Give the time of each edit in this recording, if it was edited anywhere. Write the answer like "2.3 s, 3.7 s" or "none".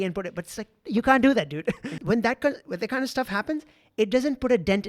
1.9 s